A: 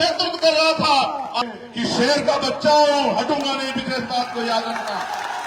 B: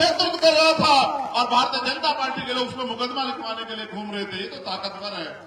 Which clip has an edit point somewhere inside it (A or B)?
A